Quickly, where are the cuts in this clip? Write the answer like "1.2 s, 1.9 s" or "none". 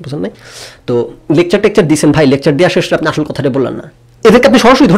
3.9 s